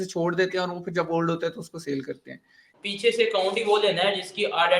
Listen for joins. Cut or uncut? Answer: cut